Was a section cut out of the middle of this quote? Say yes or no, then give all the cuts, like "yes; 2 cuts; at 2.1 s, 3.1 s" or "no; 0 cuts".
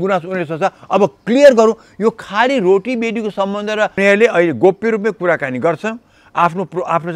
yes; 1 cut; at 4.0 s